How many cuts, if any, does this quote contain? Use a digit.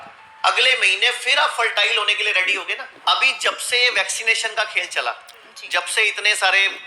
1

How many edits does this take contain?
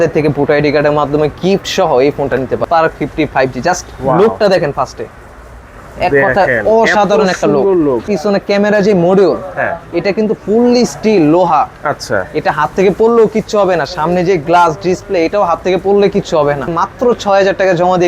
3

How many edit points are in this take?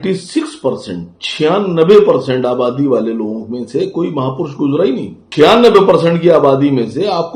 1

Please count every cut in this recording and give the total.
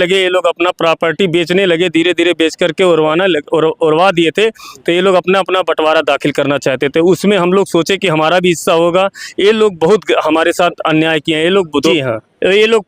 1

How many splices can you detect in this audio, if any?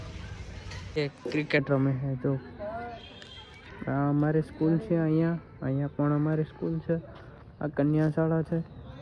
1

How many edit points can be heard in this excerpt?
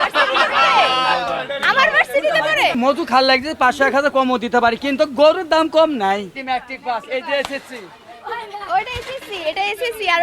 2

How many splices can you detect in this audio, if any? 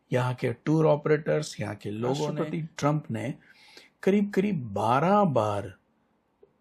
1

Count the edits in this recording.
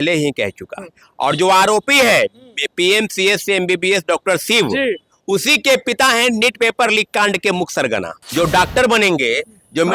1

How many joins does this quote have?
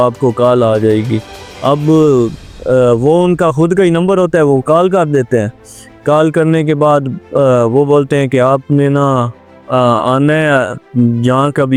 0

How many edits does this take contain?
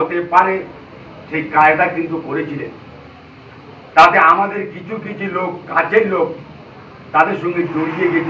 1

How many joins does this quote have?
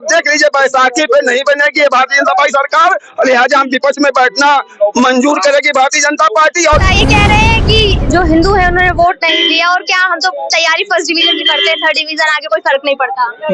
1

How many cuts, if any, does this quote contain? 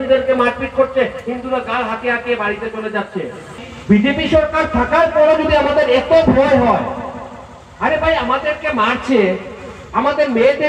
1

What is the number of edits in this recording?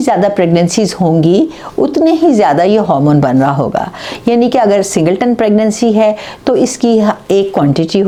0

